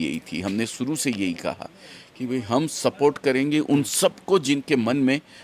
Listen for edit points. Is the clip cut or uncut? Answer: uncut